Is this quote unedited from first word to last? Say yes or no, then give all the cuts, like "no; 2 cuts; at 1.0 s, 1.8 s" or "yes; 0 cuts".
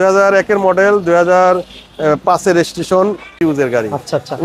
no; 1 cut; at 3.4 s